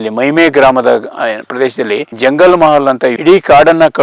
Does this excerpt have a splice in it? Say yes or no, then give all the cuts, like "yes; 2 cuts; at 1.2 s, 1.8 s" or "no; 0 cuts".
yes; 2 cuts; at 2.1 s, 3.2 s